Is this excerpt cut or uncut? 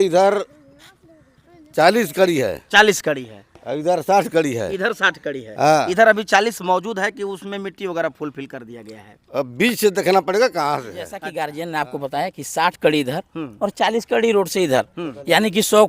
cut